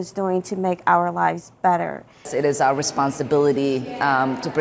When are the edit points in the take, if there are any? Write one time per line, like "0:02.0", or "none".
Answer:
0:02.3